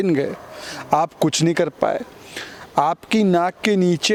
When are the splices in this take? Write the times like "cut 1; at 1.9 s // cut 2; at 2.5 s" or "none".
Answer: none